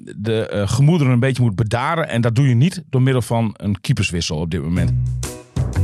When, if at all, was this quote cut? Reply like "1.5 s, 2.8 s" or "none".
4.9 s

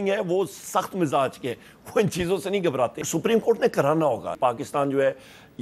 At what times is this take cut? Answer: 3.0 s, 4.4 s

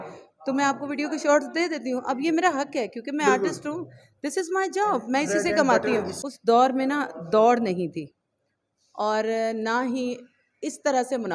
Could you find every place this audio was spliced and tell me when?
6.2 s

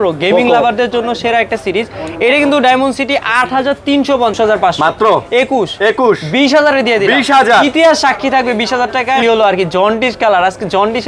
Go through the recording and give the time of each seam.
4.3 s, 9.2 s

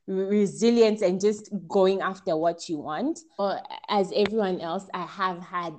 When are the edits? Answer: 3.4 s

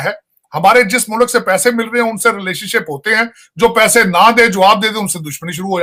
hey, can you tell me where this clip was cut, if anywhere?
none

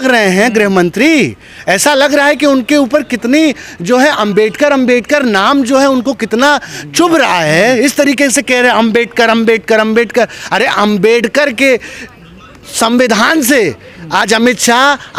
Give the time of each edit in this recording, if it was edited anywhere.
none

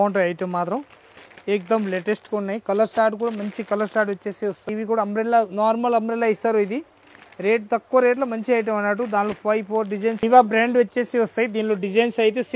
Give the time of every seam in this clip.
4.7 s, 10.2 s

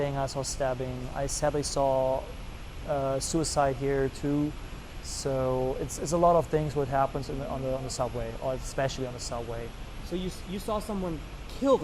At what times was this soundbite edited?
none

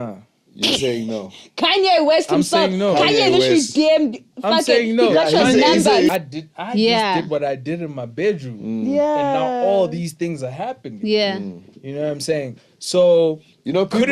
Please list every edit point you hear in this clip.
6.1 s

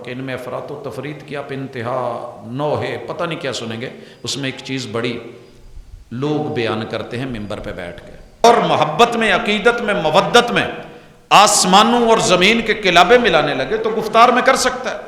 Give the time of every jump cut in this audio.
8.4 s

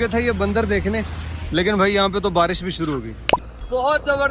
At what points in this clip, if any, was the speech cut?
3.3 s

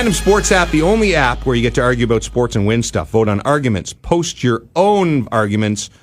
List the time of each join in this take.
none

